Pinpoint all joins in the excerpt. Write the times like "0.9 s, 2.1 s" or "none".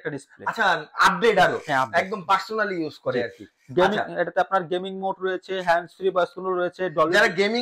none